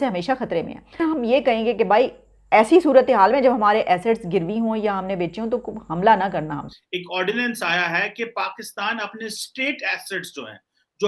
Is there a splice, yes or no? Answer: yes